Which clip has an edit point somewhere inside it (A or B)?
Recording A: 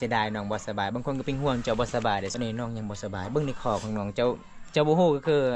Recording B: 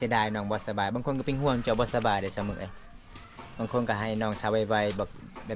A